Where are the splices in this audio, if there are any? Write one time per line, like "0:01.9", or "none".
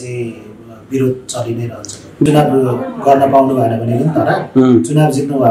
0:02.3